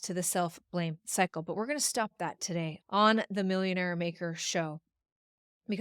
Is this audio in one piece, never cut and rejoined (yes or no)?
yes